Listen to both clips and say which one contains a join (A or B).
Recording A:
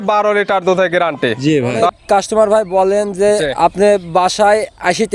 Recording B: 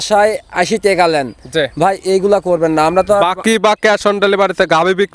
A